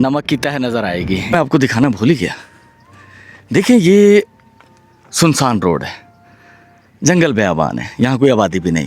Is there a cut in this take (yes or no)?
yes